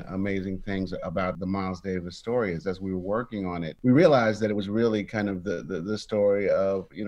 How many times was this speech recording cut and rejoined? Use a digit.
1